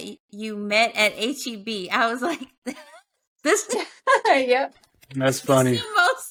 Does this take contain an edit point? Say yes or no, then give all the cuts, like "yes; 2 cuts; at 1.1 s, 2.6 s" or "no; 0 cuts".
no; 0 cuts